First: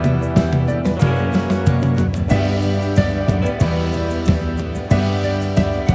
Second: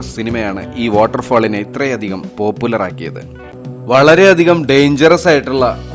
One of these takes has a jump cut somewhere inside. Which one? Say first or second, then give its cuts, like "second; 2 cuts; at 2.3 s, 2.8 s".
second; 1 cut; at 3.4 s